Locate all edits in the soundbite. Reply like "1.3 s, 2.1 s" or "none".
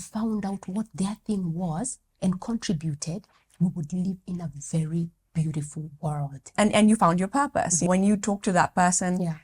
6.5 s, 7.9 s